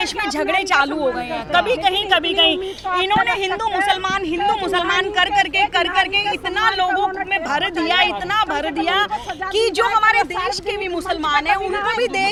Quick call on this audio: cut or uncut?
uncut